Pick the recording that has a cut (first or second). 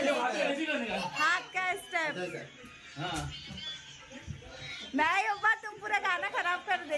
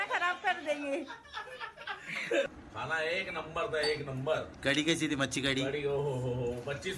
second